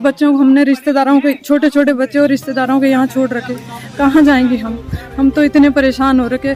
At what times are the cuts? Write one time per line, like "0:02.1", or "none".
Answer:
none